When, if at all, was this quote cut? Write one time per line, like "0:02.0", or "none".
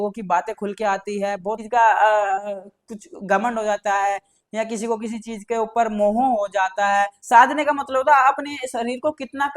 0:01.6
0:07.2